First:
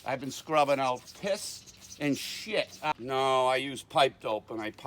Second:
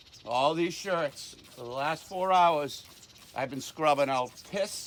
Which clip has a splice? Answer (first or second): first